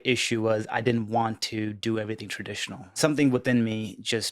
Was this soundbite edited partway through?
yes; 1 cut; at 3.0 s

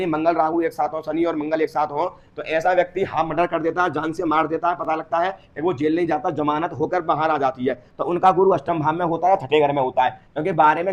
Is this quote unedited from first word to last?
yes; 0 cuts

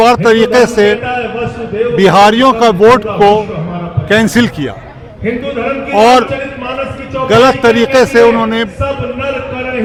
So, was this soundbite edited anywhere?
no; 0 cuts

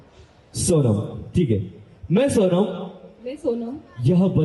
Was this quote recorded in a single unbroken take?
yes; 0 cuts

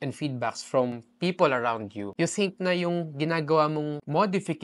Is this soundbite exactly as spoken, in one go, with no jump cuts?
yes; 0 cuts

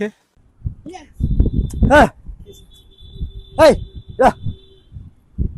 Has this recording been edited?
no; 0 cuts

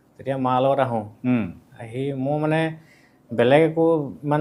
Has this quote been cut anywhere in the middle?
no; 0 cuts

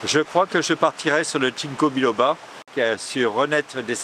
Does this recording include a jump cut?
yes; 1 cut; at 2.7 s

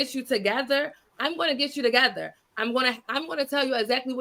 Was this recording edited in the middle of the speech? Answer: no; 0 cuts

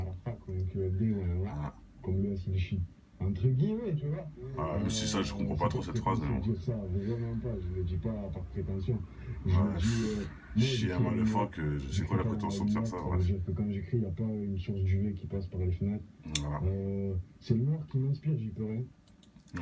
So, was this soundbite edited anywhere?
no; 0 cuts

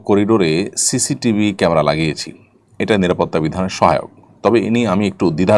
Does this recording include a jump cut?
no; 0 cuts

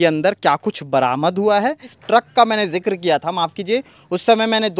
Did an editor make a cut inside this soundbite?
yes; 1 cut; at 1.9 s

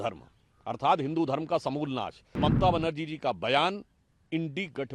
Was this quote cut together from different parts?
yes; 1 cut; at 2.2 s

